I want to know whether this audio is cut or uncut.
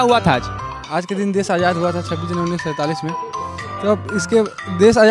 uncut